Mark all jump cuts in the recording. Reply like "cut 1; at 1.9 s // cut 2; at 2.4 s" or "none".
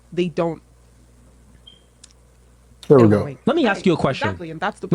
none